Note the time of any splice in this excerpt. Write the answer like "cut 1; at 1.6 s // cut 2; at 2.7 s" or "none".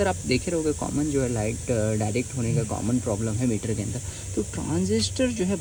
none